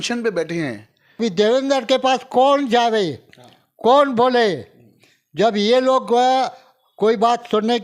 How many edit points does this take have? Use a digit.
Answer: 1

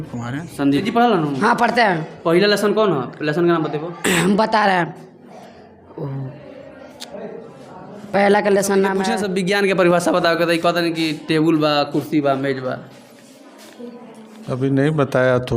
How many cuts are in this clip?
2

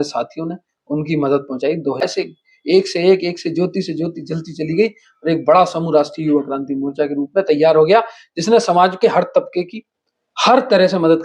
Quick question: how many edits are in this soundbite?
1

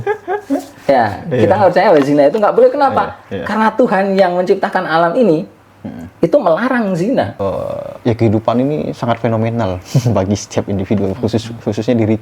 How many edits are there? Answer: 1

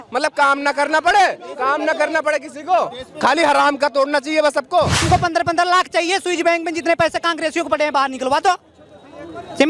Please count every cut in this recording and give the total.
1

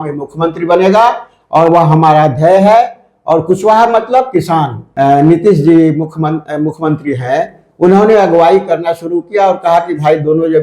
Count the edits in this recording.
1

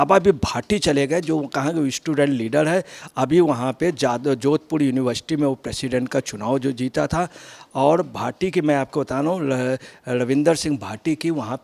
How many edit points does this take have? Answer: 0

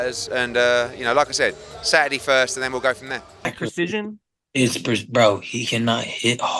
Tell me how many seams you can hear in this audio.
1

